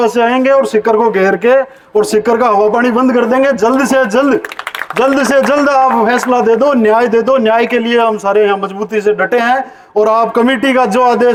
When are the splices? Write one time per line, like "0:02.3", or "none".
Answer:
none